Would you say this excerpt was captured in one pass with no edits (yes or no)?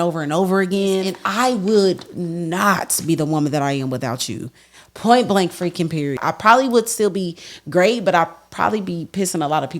no